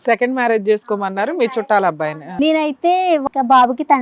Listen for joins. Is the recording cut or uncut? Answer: cut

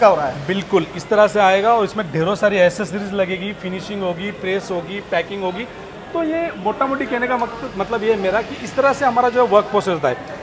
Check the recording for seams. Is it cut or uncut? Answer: uncut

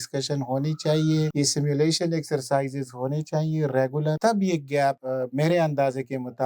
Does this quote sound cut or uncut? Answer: cut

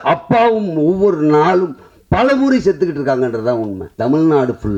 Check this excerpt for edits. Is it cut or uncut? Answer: cut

